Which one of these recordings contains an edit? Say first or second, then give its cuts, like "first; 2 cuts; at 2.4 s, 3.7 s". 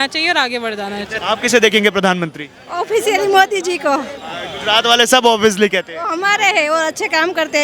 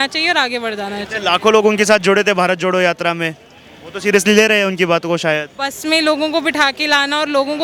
first; 1 cut; at 1.1 s